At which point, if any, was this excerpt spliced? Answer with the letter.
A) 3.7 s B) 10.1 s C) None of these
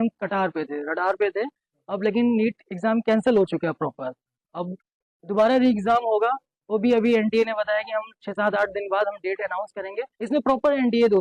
B